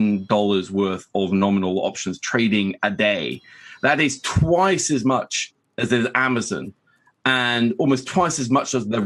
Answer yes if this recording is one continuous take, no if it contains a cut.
no